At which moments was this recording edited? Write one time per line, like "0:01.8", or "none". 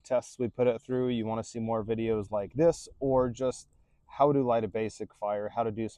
none